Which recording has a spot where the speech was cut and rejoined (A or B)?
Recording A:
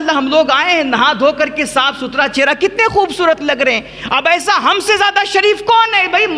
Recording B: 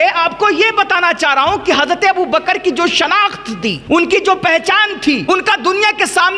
B